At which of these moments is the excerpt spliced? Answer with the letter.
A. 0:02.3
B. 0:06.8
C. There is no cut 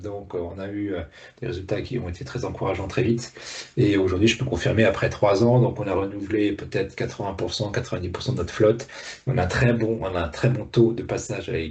C